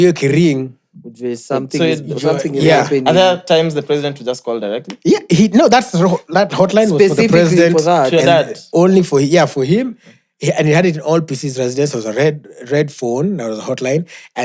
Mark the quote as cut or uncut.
uncut